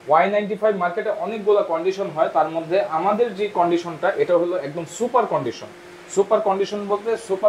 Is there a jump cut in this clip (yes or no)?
no